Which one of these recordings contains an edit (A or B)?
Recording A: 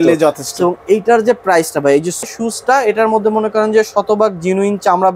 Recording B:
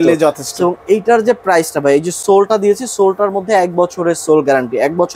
A